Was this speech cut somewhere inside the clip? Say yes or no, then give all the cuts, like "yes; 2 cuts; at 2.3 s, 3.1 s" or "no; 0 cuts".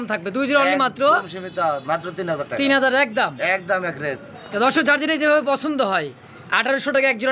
no; 0 cuts